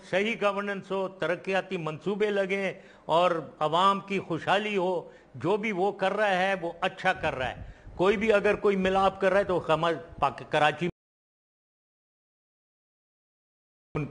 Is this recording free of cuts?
no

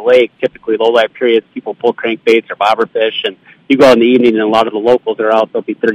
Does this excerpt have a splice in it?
no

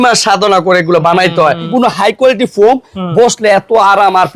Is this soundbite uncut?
no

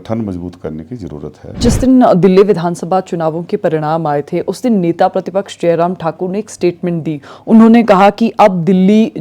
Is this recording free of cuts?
no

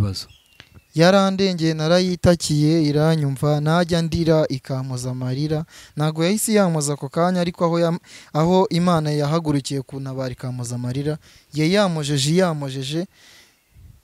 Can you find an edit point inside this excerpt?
no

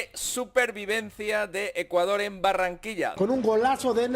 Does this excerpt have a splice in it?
yes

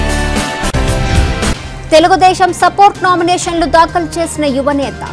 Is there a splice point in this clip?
yes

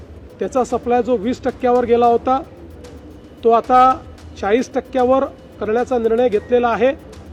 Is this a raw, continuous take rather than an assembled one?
yes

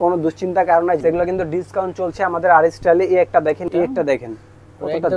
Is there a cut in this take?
yes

